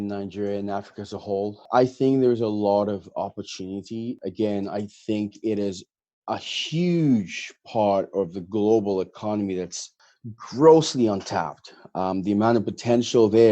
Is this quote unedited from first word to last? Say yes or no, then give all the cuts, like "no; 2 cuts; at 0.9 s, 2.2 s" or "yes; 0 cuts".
no; 2 cuts; at 1.7 s, 4.2 s